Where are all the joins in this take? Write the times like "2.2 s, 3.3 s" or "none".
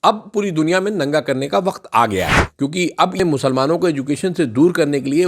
3.2 s